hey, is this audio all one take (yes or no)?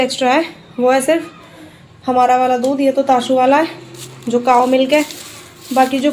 yes